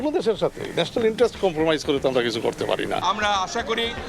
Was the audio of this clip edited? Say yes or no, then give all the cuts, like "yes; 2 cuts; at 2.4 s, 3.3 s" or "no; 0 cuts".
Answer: yes; 1 cut; at 3.0 s